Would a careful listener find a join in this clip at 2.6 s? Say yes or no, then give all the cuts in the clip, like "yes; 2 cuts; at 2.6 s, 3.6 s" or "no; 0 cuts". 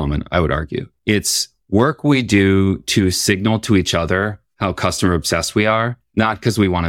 no; 3 cuts; at 0.9 s, 4.4 s, 6.0 s